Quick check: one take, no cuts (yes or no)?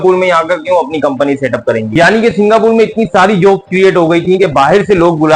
no